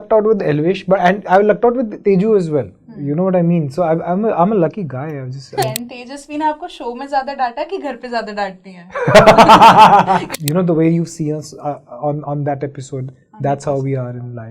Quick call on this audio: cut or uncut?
cut